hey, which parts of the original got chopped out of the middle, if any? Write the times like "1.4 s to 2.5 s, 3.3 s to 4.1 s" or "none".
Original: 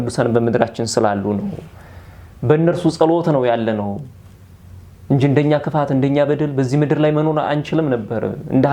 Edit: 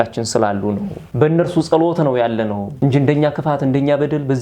1.6 s to 2.3 s, 4.0 s to 5.0 s